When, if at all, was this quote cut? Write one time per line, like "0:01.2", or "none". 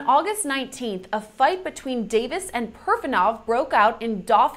none